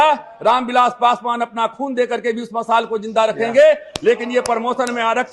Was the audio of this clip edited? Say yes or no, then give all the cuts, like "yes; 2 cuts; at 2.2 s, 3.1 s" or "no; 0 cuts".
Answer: no; 0 cuts